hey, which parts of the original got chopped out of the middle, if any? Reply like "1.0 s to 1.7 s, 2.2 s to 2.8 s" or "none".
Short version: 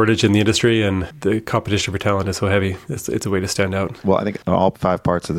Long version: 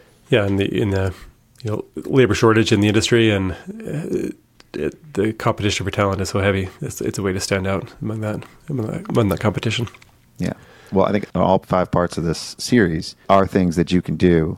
3.6 s to 5.0 s, 7.9 s to 10.8 s